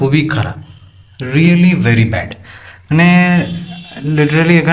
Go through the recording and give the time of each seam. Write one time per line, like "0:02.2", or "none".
none